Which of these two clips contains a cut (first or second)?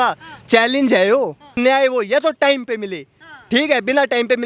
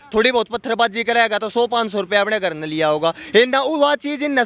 first